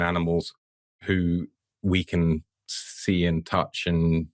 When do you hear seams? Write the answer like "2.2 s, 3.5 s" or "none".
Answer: none